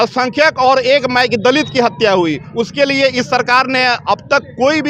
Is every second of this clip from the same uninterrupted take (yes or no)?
yes